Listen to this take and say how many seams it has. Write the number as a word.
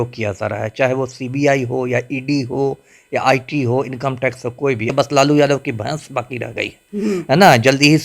one